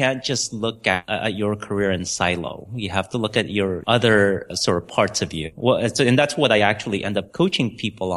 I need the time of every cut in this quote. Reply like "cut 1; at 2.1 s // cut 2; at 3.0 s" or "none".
cut 1; at 1.0 s // cut 2; at 3.8 s // cut 3; at 4.5 s // cut 4; at 5.5 s // cut 5; at 7.3 s